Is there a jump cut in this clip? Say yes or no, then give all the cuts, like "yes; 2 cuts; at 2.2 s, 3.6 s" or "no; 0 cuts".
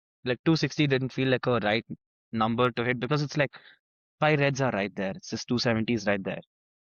no; 0 cuts